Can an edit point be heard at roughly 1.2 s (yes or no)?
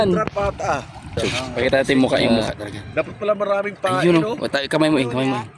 yes